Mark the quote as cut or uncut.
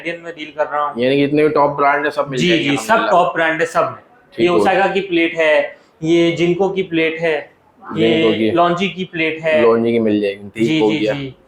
uncut